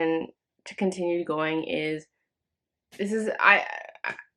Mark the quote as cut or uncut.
uncut